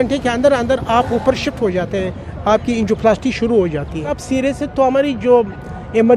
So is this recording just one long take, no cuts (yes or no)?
no